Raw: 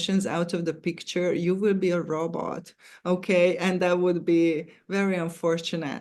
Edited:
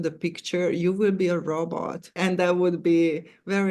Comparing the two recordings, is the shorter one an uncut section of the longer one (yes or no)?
no